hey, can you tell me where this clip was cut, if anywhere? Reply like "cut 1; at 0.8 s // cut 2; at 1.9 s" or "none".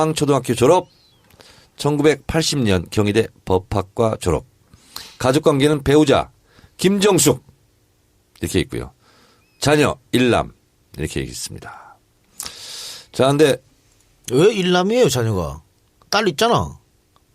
cut 1; at 6.3 s

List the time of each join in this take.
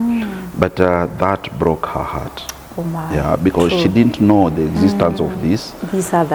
none

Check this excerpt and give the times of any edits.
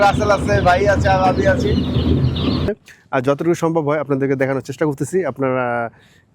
cut 1; at 2.7 s

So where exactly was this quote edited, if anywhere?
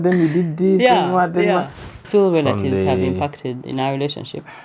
cut 1; at 2.1 s

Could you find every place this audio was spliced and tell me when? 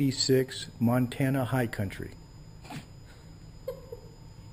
none

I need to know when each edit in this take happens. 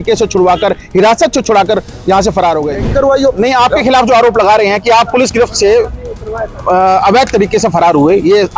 cut 1; at 2.9 s

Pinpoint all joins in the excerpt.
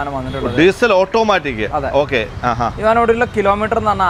none

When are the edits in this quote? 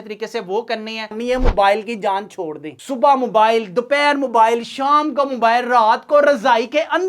cut 1; at 1.2 s

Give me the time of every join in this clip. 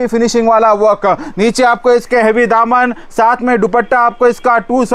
none

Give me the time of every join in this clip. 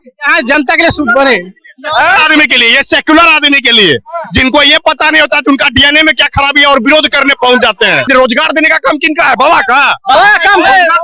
cut 1; at 8.0 s

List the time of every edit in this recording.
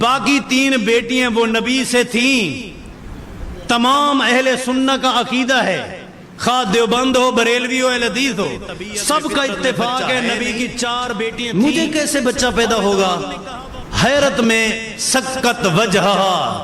cut 1; at 11.5 s

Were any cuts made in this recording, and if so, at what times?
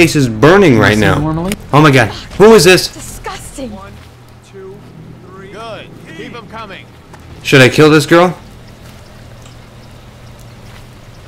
cut 1; at 1.5 s

